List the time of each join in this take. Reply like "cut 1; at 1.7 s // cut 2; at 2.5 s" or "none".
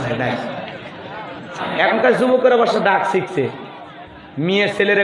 cut 1; at 1.6 s